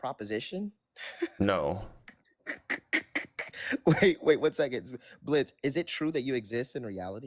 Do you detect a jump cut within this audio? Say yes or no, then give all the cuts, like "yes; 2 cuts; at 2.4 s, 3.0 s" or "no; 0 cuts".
no; 0 cuts